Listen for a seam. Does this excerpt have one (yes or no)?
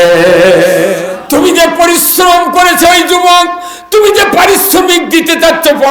yes